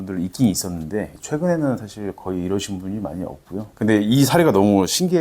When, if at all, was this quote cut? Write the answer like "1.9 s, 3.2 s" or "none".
3.7 s